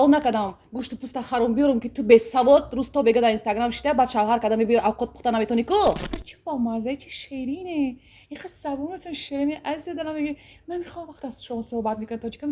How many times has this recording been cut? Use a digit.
1